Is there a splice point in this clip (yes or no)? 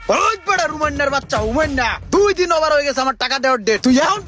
no